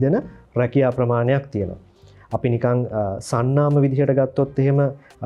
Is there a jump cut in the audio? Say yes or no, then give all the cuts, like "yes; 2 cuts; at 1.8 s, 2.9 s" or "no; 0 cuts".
no; 0 cuts